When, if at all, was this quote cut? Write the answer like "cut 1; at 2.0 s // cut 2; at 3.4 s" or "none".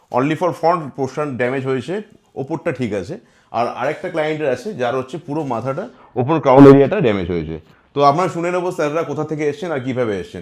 none